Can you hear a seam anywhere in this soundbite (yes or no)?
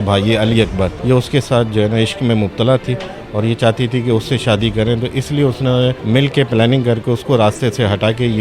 yes